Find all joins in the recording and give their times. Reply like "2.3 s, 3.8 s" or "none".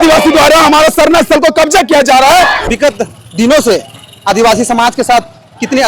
2.7 s